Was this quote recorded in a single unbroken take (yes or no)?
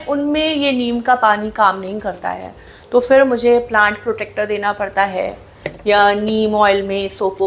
yes